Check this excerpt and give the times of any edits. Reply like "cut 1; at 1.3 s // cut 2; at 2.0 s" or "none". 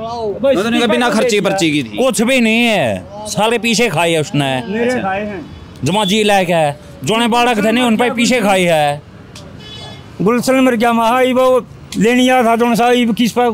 none